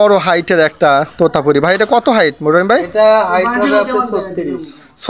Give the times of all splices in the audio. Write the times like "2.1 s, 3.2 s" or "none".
none